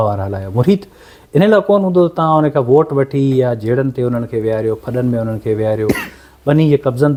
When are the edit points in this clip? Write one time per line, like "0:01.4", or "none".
none